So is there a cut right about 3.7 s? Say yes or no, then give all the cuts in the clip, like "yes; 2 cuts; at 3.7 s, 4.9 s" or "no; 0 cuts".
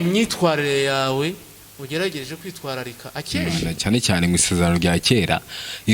yes; 1 cut; at 3.7 s